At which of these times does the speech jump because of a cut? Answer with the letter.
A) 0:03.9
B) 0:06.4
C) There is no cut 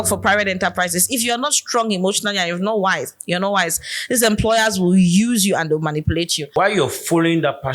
B